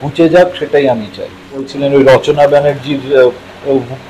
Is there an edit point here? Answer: yes; 1 cut; at 1.7 s

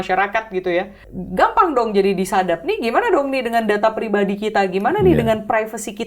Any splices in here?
yes; 1 cut; at 1.0 s

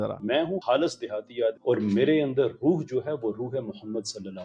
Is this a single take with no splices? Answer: yes; 0 cuts

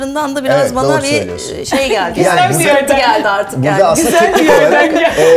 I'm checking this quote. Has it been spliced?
no; 0 cuts

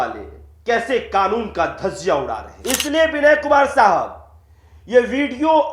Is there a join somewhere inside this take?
yes; 1 cut; at 2.5 s

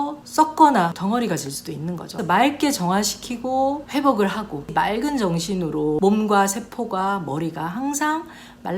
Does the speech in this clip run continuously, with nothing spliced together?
no; 4 cuts; at 1.0 s, 2.2 s, 4.7 s, 6.0 s

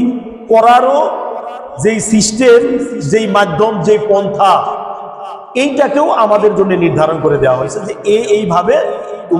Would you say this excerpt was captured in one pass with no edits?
yes; 0 cuts

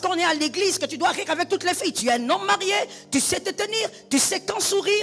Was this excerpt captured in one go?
yes; 0 cuts

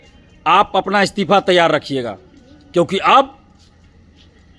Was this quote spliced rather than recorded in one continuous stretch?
no; 0 cuts

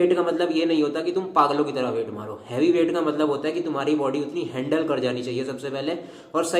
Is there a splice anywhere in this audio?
no; 0 cuts

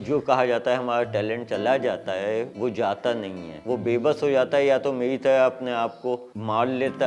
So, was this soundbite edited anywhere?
no; 0 cuts

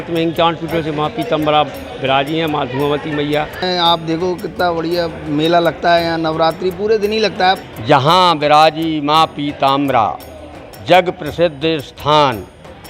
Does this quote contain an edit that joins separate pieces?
yes; 2 cuts; at 3.6 s, 7.6 s

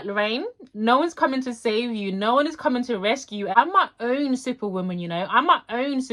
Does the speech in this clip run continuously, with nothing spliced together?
no; 1 cut; at 3.4 s

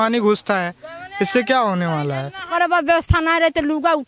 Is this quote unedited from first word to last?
no; 1 cut; at 2.5 s

